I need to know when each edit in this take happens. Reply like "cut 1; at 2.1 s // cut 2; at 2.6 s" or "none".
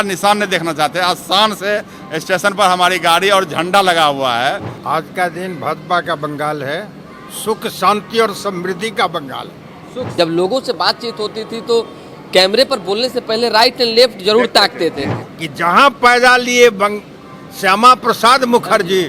cut 1; at 4.7 s // cut 2; at 10.0 s // cut 3; at 15.1 s